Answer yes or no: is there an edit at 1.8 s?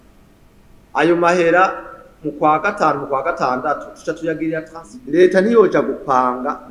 no